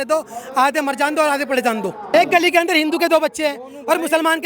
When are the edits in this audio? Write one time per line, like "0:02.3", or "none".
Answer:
0:02.1